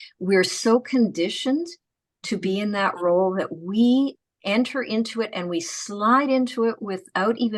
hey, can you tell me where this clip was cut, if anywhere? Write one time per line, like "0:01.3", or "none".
none